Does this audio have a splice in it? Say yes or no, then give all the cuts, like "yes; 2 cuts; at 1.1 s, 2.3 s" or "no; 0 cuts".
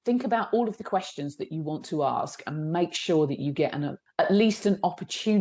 yes; 1 cut; at 4.0 s